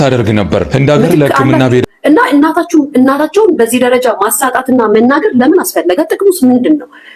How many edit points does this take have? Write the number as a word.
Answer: one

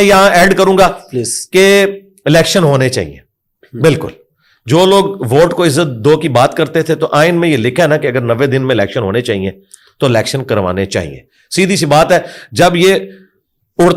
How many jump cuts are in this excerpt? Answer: zero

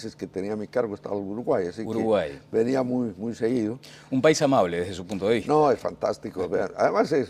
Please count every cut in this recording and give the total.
one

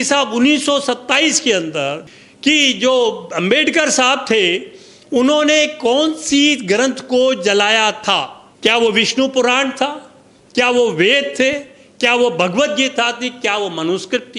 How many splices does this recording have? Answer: two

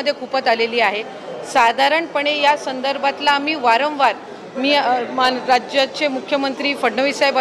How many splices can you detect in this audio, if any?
zero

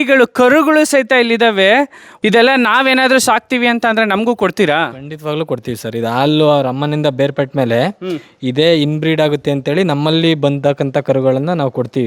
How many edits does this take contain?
one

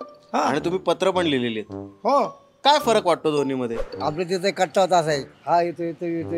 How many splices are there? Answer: two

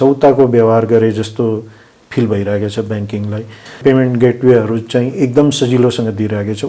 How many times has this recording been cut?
one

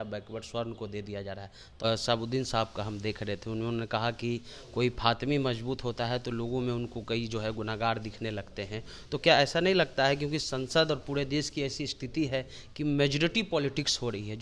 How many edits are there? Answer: one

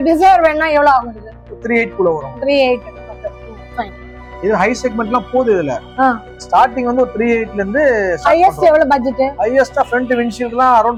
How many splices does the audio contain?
zero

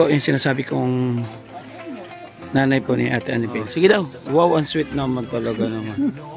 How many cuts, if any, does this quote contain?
one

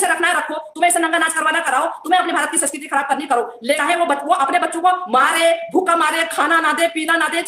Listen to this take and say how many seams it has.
one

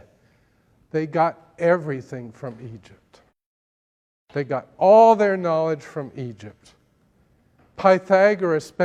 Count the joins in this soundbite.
zero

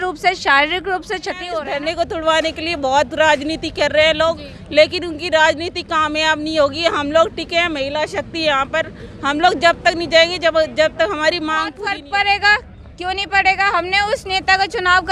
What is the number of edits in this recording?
two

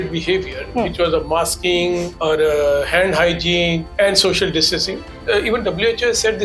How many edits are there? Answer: three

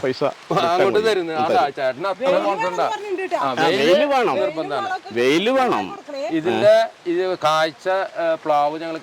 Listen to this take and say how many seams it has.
zero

